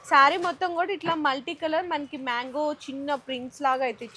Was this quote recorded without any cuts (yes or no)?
yes